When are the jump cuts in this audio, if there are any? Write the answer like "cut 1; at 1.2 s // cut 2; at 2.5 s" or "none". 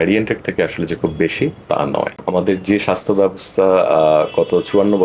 cut 1; at 2.2 s